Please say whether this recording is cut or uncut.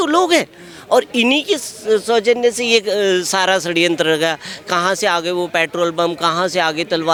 uncut